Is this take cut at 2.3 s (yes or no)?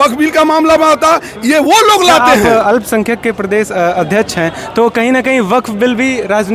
yes